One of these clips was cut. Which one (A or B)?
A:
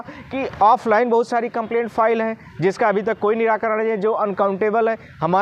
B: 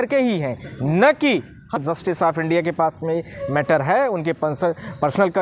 B